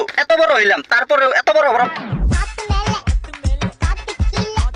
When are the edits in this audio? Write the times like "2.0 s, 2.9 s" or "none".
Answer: 1.9 s